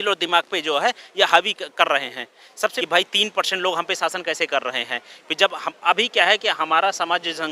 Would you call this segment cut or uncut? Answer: cut